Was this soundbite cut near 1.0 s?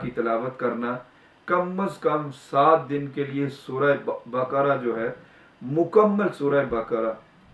no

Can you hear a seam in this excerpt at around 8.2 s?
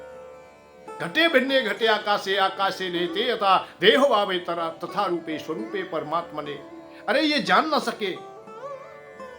yes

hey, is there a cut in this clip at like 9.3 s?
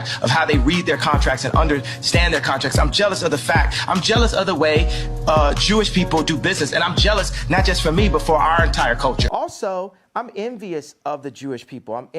yes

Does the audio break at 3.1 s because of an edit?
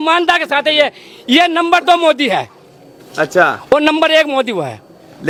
no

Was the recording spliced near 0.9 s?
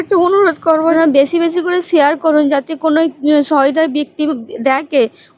yes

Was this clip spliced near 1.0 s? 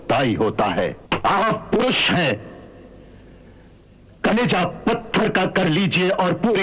yes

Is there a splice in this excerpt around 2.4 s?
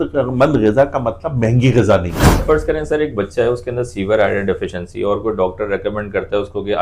yes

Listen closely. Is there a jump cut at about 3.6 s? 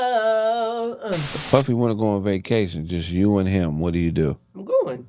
no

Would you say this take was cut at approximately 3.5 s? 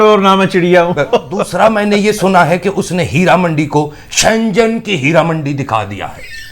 no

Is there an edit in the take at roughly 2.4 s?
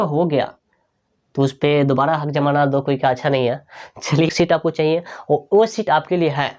no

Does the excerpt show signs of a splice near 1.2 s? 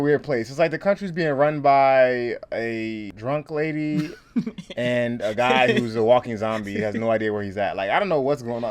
no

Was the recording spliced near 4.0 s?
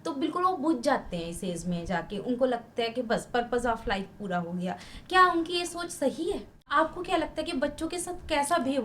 no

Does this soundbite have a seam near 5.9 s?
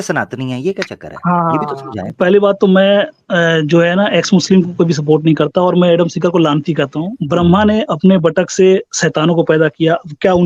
no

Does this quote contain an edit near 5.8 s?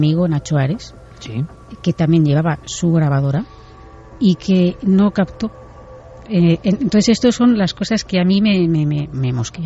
no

